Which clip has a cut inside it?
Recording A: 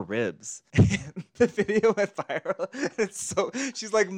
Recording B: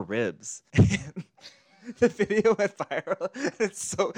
A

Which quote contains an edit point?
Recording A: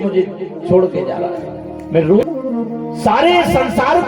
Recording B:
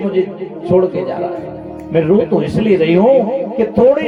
A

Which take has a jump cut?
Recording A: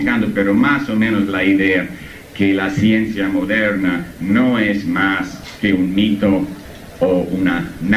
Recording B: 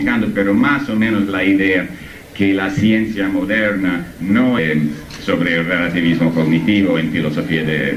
A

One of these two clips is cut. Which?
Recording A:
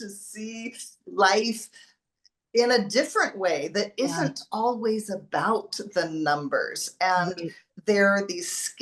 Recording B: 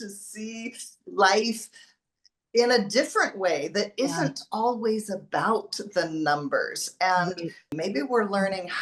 B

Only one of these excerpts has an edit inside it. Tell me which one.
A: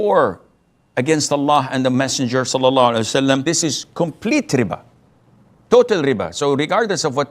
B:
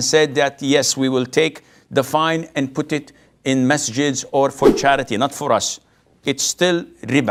A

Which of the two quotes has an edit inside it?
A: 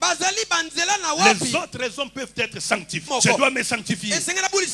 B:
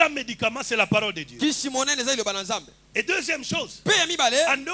A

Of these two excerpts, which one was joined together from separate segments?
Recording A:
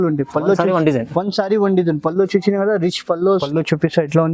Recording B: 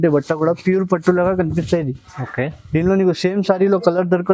A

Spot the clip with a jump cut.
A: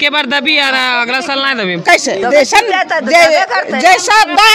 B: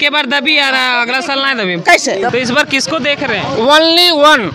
B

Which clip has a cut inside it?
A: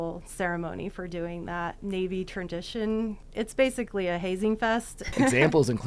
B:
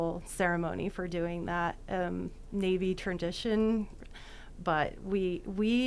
A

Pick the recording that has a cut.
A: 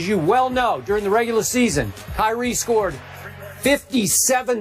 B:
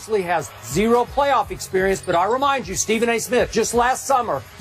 B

